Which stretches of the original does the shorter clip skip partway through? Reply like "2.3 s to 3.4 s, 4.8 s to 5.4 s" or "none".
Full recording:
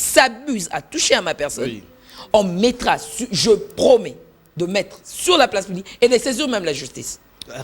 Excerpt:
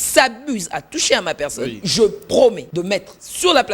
1.8 s to 3.3 s, 4.1 s to 4.5 s